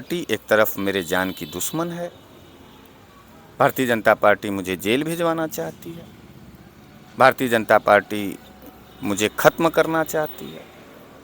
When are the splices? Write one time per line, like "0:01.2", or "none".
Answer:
none